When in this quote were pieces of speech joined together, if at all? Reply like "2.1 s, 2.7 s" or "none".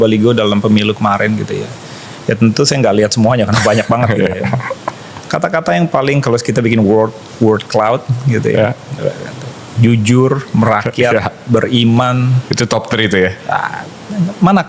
none